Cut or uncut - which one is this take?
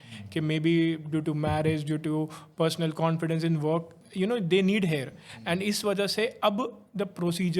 cut